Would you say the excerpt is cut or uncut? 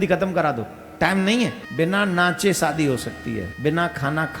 cut